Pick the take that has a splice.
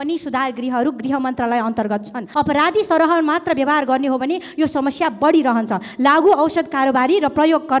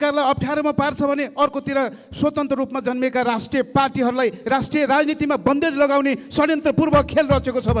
first; 1 cut; at 2.2 s

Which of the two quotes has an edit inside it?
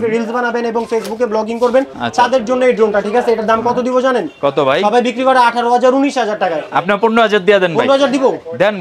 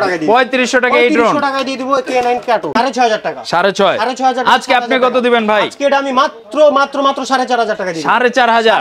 second; 1 cut; at 2.8 s

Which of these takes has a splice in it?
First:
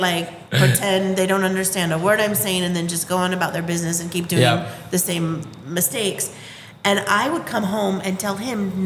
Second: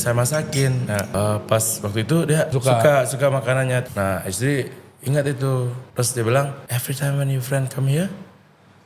second; 5 cuts; at 1.1 s, 2.5 s, 3.9 s, 5.8 s, 6.7 s

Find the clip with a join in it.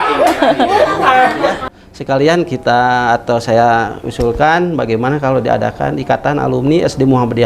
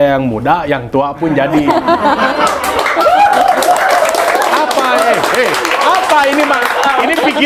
first; 1 cut; at 1.6 s

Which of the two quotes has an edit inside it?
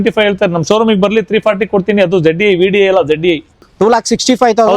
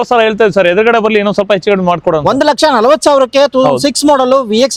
first; 1 cut; at 3.7 s

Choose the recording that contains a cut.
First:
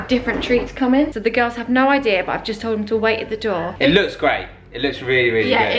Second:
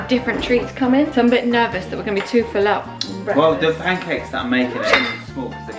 first; 2 cuts; at 1.1 s, 3.7 s

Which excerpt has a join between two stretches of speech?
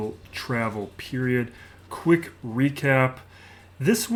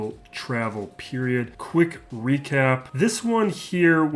second; 2 cuts; at 1.6 s, 2.9 s

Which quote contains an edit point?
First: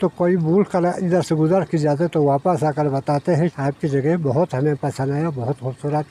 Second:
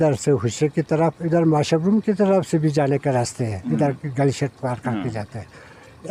first; 1 cut; at 3.6 s

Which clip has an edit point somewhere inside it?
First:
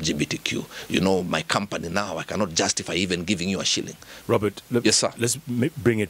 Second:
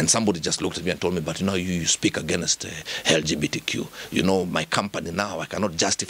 first; 1 cut; at 4.1 s

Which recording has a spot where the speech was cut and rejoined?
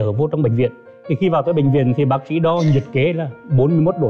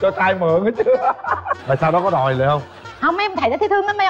second; 1 cut; at 1.5 s

